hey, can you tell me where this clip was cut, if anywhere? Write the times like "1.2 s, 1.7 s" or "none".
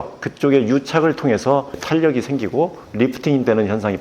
1.8 s

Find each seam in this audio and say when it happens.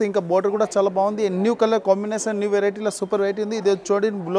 none

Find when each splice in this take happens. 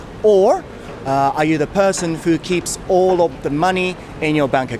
none

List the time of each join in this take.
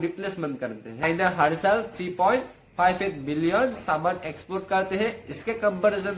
1.0 s

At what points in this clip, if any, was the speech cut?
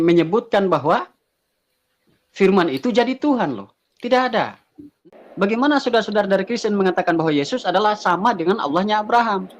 5.0 s

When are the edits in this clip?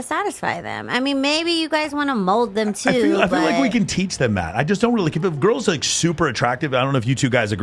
none

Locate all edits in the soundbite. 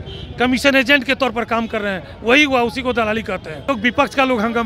3.5 s

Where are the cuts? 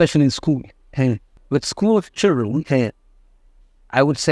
1.3 s

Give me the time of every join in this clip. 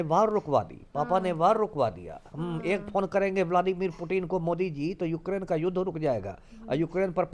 none

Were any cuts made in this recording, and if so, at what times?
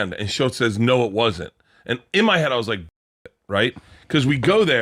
none

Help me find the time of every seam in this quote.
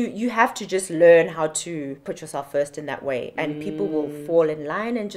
2.0 s

